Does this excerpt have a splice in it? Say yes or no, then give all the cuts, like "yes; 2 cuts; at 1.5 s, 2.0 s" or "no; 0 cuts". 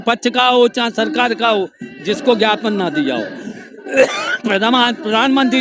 no; 0 cuts